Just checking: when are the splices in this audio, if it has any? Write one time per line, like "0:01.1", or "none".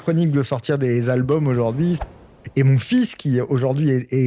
0:02.3